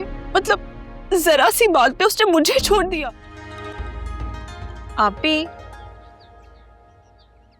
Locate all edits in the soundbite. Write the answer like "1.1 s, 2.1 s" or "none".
3.0 s